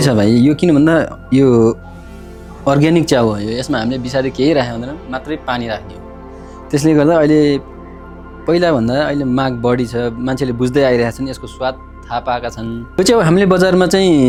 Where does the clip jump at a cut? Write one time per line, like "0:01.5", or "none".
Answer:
none